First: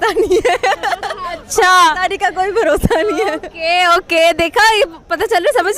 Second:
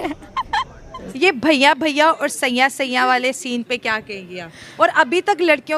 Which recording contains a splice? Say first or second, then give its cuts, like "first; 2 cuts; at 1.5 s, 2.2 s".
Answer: second; 1 cut; at 1.0 s